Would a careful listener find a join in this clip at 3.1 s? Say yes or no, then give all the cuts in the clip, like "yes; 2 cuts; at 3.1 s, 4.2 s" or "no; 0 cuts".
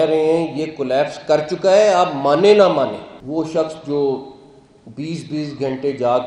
yes; 1 cut; at 3.1 s